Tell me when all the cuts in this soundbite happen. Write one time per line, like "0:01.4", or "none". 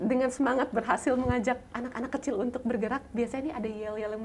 none